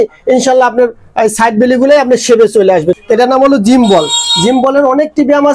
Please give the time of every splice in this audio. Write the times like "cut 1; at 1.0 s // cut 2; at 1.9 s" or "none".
cut 1; at 3.0 s